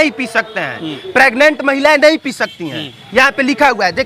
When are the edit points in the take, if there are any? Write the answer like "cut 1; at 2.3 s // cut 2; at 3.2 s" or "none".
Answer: none